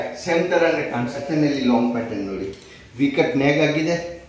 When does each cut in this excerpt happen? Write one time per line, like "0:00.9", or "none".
0:01.2